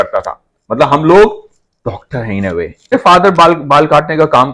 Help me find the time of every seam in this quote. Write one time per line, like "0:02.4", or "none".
0:02.9